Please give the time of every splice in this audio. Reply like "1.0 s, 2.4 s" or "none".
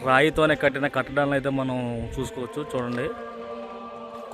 none